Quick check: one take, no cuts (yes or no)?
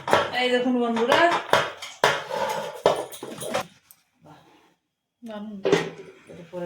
no